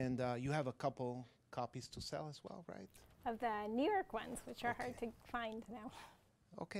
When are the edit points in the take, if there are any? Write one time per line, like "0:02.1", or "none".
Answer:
0:04.3